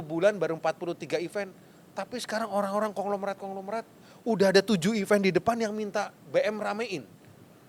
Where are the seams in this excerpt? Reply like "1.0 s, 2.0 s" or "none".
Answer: none